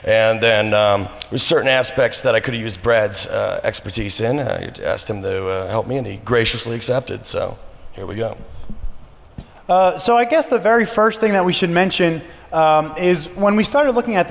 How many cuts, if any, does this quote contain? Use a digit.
1